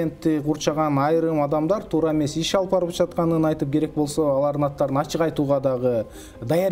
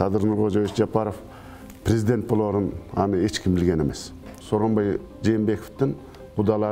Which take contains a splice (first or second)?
second